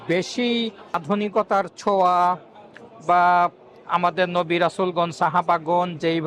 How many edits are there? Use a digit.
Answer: 1